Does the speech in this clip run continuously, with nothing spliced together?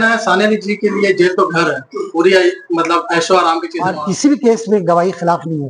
no; 1 cut; at 3.7 s

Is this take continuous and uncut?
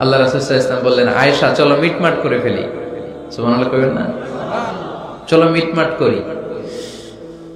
yes; 0 cuts

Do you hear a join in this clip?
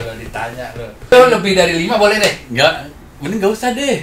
yes; 1 cut; at 1.1 s

